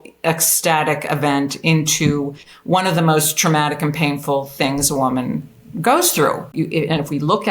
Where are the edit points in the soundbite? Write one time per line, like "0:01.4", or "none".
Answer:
0:06.5